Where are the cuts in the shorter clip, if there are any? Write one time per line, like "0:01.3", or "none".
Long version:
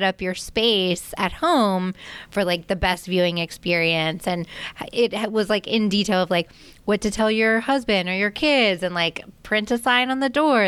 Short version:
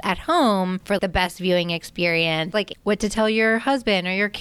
0:00.9
0:02.5